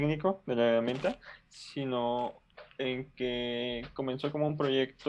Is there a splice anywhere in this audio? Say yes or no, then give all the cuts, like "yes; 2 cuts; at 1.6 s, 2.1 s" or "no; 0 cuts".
no; 0 cuts